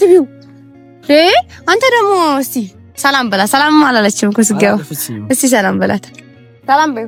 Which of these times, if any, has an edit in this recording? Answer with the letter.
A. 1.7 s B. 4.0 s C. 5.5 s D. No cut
D